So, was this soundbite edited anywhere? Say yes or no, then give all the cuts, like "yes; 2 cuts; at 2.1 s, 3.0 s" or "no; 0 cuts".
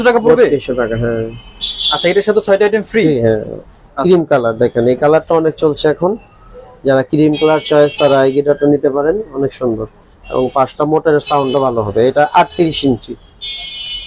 no; 0 cuts